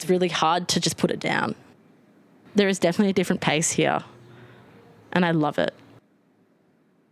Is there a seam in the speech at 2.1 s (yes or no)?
yes